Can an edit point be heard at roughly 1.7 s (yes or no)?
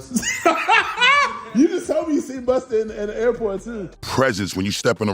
no